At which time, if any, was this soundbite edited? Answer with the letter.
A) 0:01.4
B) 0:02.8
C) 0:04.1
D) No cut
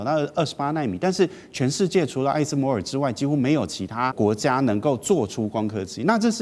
C